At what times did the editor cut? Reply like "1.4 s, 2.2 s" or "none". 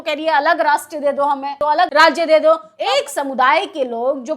1.6 s, 2.7 s